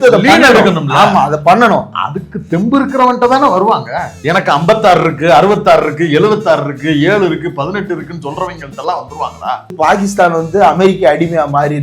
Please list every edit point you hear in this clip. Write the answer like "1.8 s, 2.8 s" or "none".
4.1 s, 9.7 s